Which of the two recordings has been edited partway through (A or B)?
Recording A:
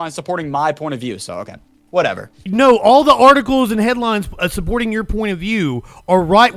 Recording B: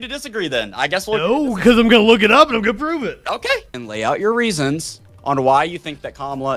B